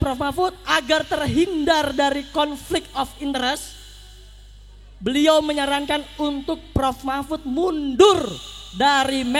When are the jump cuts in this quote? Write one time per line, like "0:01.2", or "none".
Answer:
none